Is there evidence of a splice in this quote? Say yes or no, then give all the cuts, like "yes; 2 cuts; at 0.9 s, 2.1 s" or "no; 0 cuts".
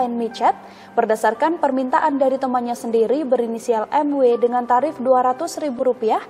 no; 0 cuts